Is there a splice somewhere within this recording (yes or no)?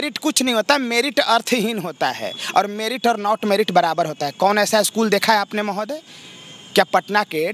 no